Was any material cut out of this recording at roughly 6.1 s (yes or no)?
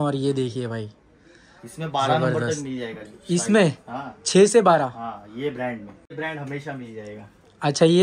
yes